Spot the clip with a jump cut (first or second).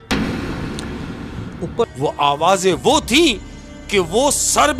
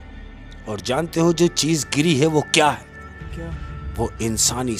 first